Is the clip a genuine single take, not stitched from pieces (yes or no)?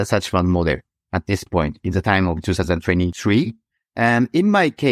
no